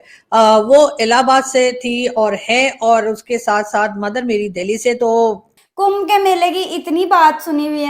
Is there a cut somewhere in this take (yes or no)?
yes